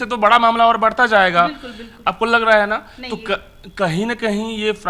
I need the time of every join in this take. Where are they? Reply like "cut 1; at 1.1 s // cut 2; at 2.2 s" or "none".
none